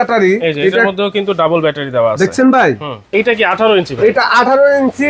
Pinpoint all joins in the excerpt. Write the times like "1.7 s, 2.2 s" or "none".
3.0 s